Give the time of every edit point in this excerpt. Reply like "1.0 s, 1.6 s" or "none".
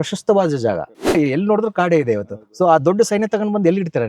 1.1 s